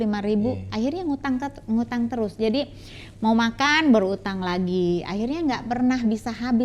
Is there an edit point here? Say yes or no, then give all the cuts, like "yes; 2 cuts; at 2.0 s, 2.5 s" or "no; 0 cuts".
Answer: no; 0 cuts